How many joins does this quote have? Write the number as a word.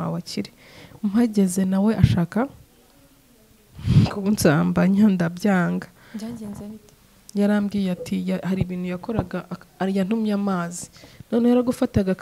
zero